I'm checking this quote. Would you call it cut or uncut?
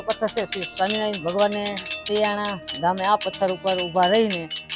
cut